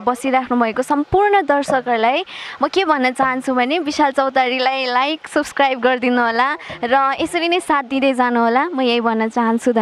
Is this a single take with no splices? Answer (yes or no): yes